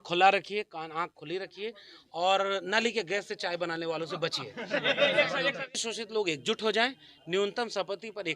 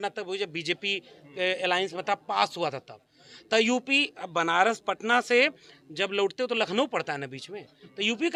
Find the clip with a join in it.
first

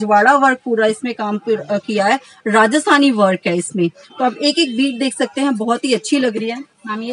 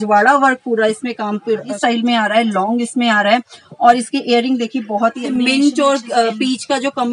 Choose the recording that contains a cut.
second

